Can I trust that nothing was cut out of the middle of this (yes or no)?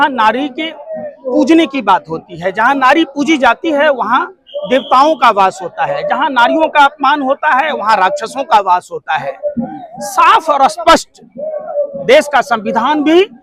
yes